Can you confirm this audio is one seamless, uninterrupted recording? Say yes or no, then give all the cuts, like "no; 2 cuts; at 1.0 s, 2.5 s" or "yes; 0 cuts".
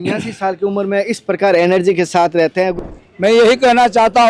no; 1 cut; at 2.7 s